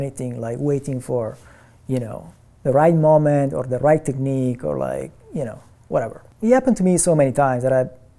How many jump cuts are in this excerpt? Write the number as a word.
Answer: one